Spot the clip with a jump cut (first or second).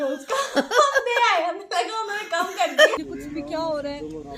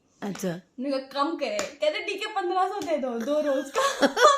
first